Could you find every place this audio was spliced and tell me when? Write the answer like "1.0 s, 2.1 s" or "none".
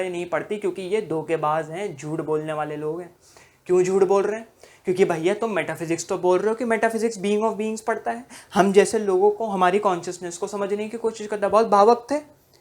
none